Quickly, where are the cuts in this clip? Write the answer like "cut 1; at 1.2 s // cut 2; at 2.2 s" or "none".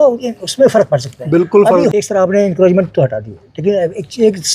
cut 1; at 1.9 s